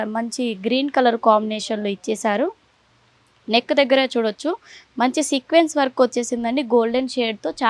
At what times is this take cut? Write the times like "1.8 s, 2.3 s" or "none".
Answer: none